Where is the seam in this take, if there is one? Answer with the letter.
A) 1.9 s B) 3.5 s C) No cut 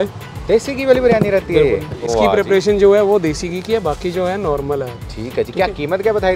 C